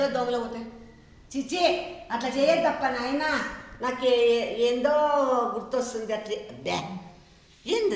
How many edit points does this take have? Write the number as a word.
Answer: zero